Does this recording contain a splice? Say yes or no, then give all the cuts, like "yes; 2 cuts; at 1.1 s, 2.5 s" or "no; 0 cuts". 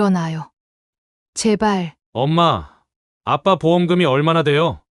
yes; 1 cut; at 2.0 s